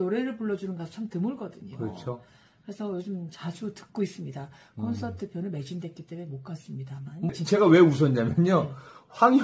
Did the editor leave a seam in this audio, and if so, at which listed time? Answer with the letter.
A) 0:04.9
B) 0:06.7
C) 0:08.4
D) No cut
D